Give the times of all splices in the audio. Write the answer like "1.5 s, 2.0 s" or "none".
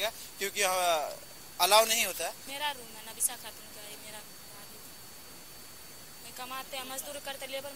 2.4 s